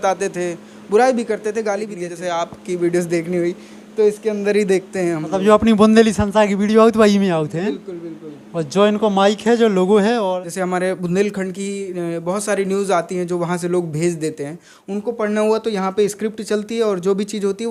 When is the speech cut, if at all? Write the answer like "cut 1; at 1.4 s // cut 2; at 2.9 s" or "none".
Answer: cut 1; at 2.0 s // cut 2; at 10.4 s